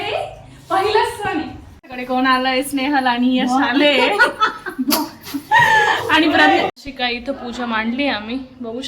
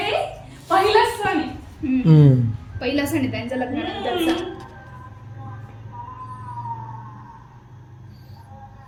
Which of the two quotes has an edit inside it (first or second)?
first